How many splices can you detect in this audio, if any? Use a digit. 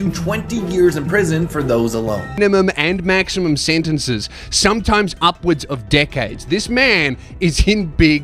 1